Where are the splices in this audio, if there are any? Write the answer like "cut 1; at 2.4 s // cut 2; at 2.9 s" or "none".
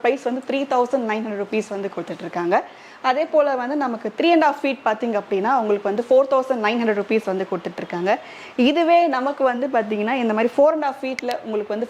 none